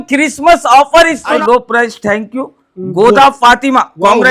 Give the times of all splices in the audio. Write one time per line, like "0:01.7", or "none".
0:01.4

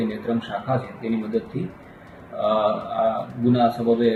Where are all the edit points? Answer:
none

